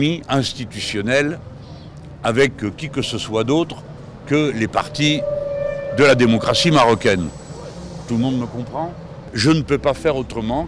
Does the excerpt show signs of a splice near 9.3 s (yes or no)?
yes